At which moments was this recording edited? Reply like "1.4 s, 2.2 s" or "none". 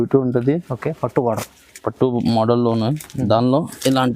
none